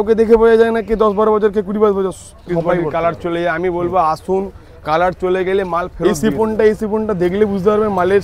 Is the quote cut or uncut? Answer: cut